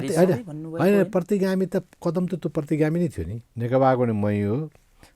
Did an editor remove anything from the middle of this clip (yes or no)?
yes